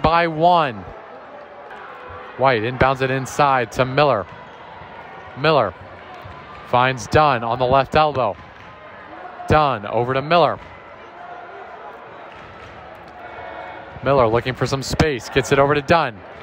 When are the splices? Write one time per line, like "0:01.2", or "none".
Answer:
0:01.7